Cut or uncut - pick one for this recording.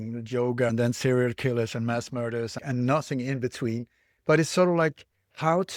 cut